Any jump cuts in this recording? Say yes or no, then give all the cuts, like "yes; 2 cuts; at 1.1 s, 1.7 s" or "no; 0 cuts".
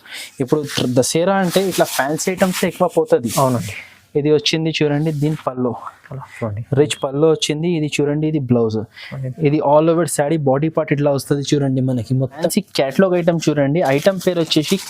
yes; 1 cut; at 12.4 s